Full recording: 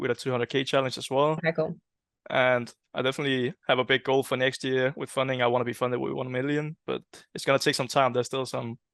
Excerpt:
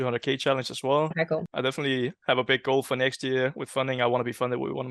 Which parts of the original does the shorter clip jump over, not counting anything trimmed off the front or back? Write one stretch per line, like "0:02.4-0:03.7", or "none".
0:01.8-0:02.9